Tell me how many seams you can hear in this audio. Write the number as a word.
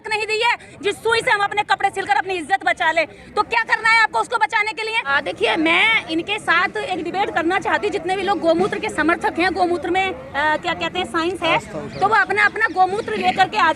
one